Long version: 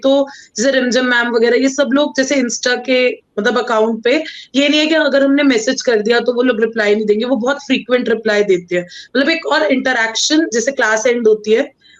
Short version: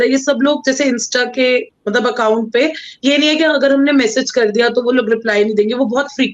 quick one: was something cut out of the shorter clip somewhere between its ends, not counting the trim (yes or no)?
no